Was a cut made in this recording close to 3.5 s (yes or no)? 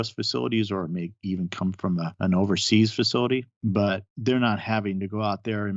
yes